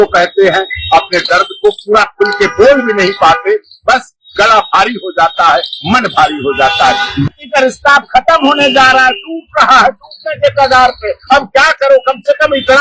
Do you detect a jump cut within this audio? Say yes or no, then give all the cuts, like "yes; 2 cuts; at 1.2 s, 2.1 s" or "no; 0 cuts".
yes; 1 cut; at 7.3 s